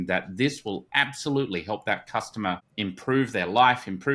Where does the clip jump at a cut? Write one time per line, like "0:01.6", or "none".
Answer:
0:02.7